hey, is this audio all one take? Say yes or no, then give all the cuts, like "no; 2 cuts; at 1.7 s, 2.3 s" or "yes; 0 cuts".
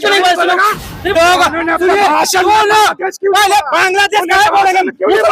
no; 1 cut; at 1.1 s